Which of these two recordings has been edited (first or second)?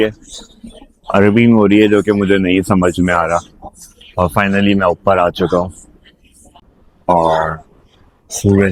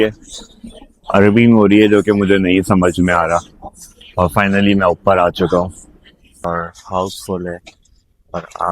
second